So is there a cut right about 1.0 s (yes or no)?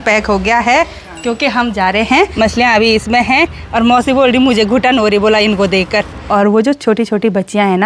no